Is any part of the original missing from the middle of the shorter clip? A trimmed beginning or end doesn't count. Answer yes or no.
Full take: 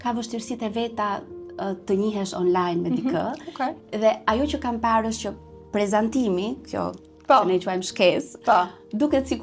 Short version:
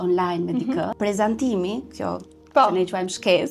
yes